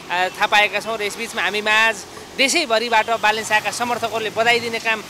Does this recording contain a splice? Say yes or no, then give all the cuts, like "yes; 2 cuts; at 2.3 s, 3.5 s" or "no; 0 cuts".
no; 0 cuts